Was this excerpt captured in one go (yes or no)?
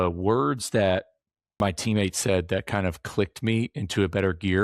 no